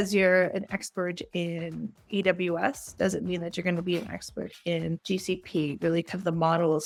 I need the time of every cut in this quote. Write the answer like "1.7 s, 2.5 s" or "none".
none